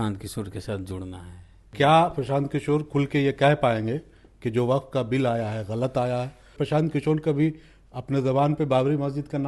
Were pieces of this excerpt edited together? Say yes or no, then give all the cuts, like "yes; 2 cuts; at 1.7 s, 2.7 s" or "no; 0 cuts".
yes; 2 cuts; at 1.7 s, 6.5 s